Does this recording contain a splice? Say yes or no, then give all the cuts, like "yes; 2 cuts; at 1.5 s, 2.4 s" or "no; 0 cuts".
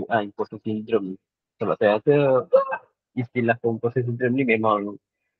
no; 0 cuts